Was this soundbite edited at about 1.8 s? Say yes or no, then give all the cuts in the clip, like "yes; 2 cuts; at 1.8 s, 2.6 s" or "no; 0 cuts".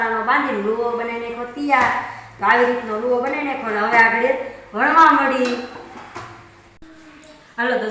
no; 0 cuts